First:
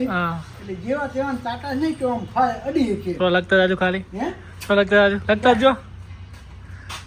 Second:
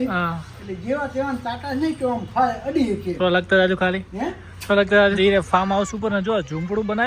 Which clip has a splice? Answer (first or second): second